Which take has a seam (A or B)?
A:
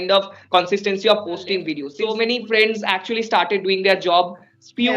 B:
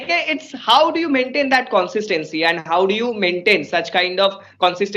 A